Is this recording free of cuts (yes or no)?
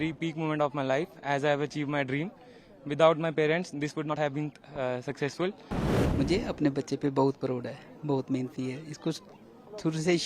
no